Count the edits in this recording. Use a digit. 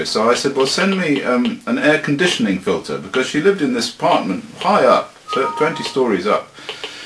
1